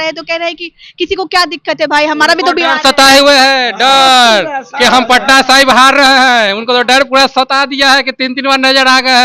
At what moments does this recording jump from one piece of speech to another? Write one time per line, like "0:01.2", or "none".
none